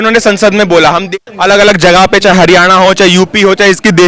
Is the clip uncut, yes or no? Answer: no